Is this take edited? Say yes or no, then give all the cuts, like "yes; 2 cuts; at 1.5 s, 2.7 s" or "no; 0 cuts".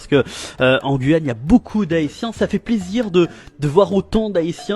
no; 0 cuts